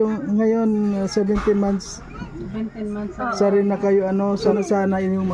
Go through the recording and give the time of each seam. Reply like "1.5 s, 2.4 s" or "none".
4.4 s